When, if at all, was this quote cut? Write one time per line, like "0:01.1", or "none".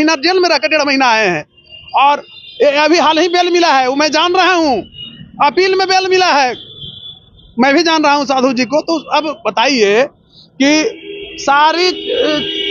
none